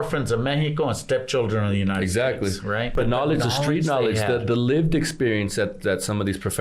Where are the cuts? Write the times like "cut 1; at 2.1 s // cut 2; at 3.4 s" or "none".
cut 1; at 2.9 s